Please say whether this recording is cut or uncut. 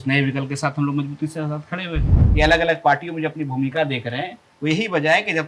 cut